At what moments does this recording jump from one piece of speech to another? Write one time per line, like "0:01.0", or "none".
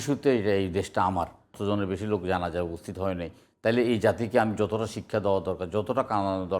0:01.6